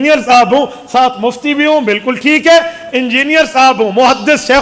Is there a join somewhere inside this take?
no; 0 cuts

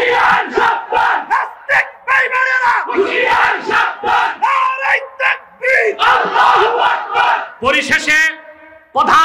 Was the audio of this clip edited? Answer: no; 0 cuts

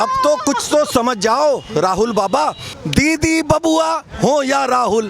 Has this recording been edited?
yes; 1 cut; at 2.7 s

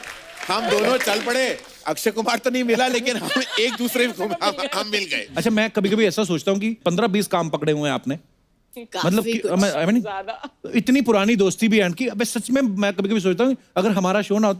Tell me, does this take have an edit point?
yes; 1 cut; at 5.2 s

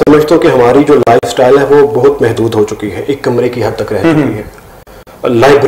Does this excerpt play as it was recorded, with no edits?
yes; 0 cuts

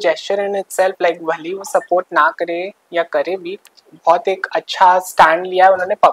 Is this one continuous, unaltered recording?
yes; 0 cuts

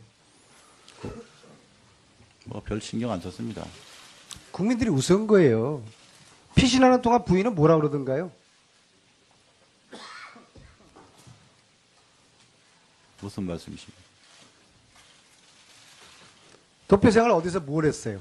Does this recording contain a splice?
yes; 1 cut; at 9.7 s

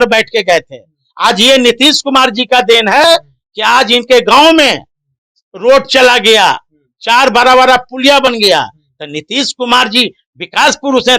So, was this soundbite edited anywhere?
no; 0 cuts

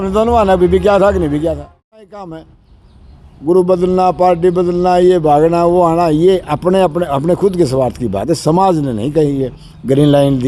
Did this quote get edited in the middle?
yes; 1 cut; at 2.1 s

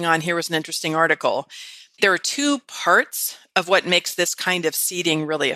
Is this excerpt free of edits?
no; 1 cut; at 2.0 s

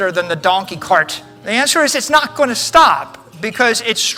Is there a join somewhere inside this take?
no; 0 cuts

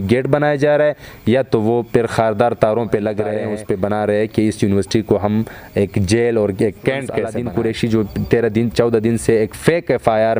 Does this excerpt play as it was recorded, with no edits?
no; 2 cuts; at 3.5 s, 7.3 s

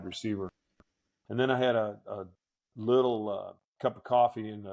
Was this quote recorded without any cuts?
yes; 0 cuts

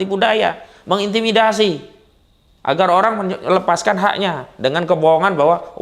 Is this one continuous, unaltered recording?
yes; 0 cuts

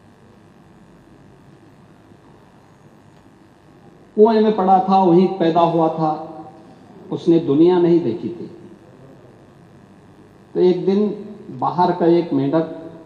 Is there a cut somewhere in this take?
no; 0 cuts

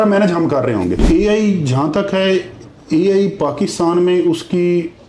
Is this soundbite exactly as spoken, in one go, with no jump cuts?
no; 1 cut; at 1.0 s

